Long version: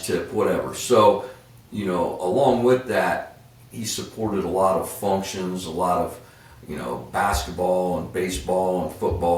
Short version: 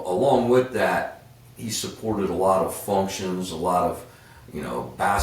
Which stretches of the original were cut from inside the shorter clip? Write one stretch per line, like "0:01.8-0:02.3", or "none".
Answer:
none